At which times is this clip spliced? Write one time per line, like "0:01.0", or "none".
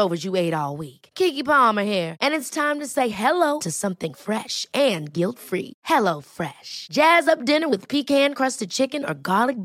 none